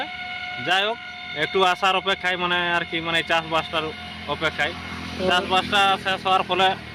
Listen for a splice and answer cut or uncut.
uncut